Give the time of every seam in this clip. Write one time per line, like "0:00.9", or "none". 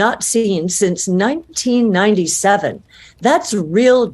none